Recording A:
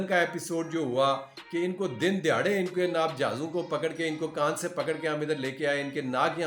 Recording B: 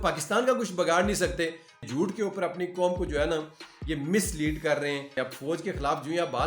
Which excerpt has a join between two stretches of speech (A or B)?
B